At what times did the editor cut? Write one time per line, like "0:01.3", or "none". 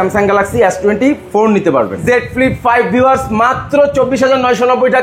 0:02.0